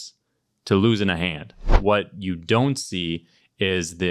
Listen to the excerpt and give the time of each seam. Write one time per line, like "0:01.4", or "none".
0:01.7